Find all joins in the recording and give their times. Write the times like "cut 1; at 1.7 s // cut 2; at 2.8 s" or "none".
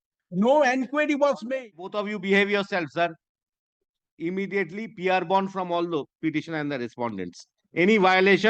cut 1; at 1.9 s

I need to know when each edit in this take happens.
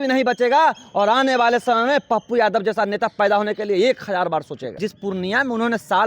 cut 1; at 4.7 s

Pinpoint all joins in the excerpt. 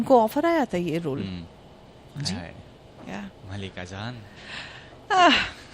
none

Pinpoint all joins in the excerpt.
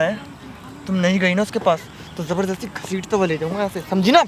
none

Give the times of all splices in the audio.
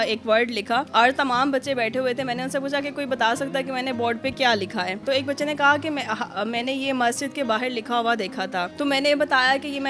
cut 1; at 5.0 s // cut 2; at 8.7 s

